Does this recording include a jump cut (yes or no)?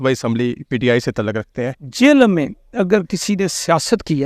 yes